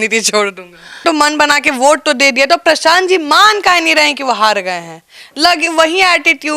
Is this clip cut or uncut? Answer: cut